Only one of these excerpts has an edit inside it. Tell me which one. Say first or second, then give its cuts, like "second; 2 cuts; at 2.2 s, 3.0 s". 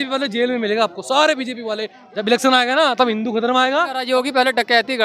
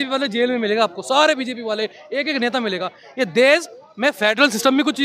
first; 2 cuts; at 2.0 s, 4.0 s